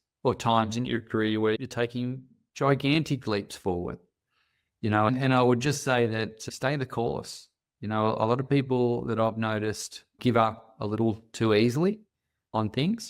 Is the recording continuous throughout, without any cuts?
no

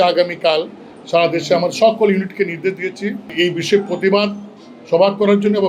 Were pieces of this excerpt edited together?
no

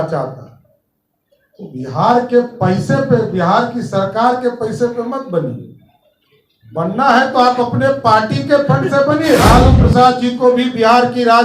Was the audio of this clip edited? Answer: yes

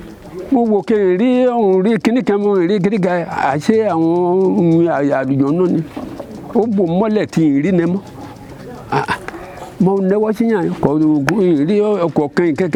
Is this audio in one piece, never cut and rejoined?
yes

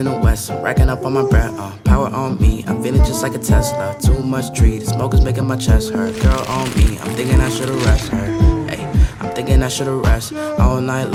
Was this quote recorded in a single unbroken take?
yes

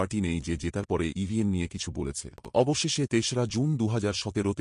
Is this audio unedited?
no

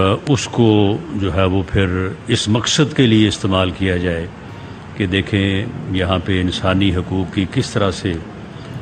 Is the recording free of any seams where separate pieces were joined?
yes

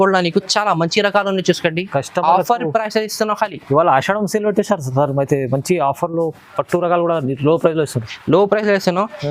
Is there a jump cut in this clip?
no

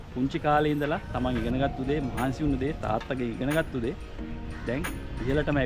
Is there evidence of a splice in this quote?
no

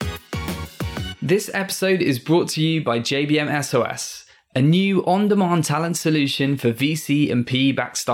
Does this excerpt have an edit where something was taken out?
yes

